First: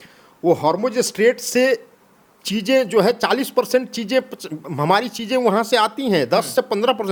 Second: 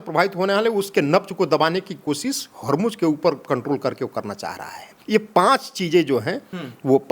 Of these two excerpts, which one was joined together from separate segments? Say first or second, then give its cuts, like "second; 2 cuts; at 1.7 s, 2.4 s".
second; 1 cut; at 4.9 s